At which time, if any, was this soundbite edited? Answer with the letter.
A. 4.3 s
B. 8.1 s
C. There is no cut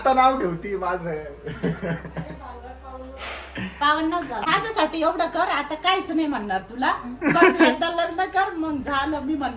A